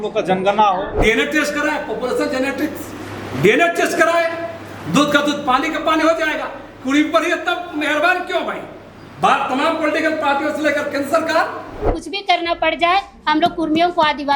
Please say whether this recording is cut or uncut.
cut